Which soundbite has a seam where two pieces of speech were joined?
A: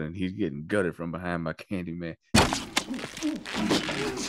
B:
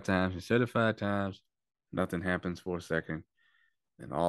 A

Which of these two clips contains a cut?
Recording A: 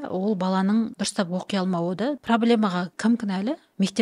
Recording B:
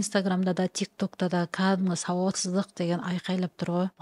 A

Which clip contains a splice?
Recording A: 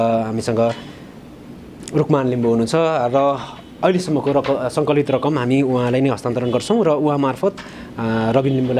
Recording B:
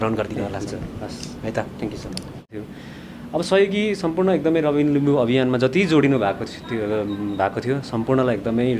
B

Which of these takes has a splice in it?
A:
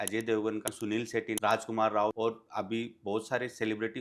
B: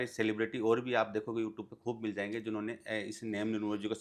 A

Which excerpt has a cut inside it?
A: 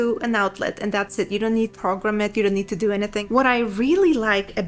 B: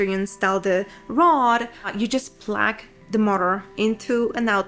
A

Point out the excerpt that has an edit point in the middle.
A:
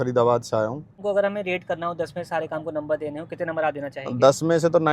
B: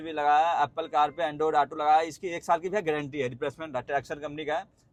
A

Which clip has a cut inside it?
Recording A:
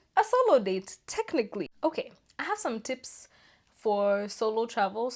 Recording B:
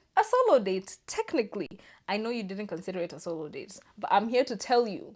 A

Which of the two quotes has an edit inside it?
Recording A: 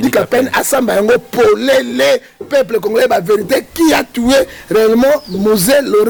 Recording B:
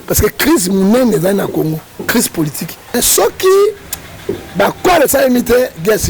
B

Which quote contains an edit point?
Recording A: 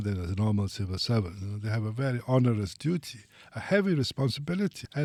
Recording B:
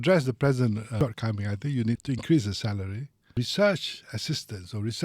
B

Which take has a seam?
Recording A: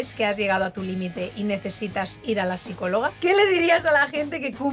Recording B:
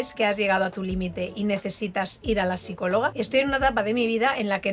A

